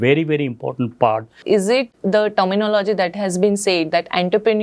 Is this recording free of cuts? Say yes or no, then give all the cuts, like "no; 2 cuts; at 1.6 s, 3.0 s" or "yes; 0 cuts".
no; 1 cut; at 1.4 s